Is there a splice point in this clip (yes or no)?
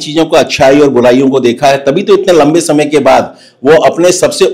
no